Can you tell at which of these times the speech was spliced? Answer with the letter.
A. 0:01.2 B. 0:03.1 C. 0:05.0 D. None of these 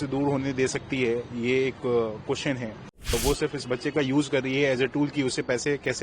B